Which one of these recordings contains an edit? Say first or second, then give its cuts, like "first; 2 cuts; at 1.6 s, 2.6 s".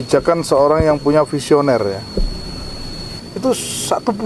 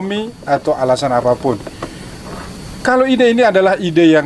first; 1 cut; at 3.1 s